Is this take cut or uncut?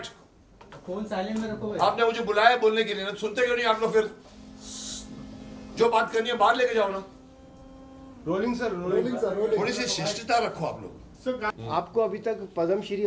cut